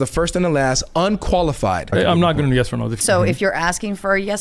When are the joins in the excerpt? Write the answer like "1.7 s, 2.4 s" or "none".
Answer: 1.9 s, 3.0 s